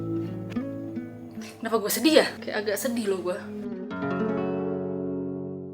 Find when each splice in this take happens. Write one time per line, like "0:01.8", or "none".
0:02.4